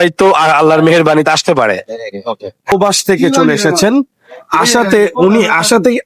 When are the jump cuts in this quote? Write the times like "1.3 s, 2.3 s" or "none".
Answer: 2.7 s